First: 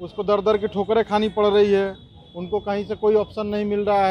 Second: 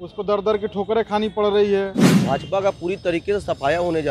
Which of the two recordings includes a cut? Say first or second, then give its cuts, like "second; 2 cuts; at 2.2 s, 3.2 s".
second; 1 cut; at 2.1 s